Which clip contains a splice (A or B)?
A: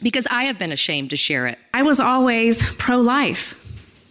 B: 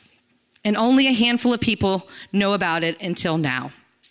A